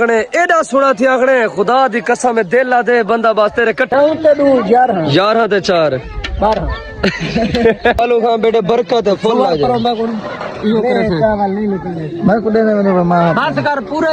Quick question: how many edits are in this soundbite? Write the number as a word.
two